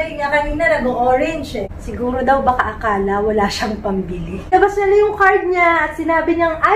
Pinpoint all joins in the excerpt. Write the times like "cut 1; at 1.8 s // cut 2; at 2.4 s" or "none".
cut 1; at 1.7 s // cut 2; at 4.5 s